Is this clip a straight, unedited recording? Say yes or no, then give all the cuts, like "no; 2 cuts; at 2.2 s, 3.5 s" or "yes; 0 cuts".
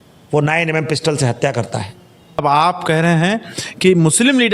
no; 1 cut; at 2.4 s